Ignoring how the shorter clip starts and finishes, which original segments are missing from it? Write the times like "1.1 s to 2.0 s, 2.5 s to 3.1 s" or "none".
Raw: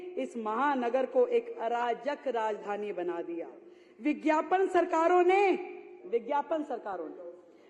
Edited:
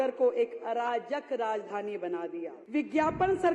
3.5 s to 3.9 s